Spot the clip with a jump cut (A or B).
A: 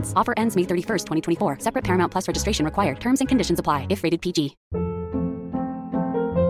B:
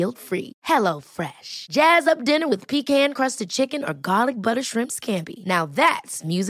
A